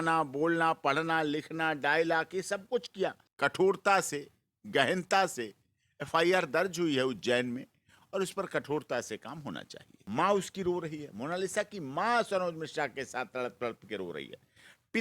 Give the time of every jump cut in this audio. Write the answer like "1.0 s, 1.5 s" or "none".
3.2 s, 10.1 s